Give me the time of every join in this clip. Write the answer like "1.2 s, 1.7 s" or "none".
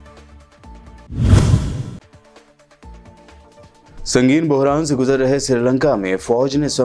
1.0 s